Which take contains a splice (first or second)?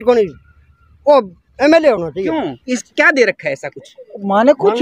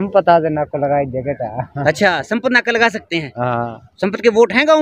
first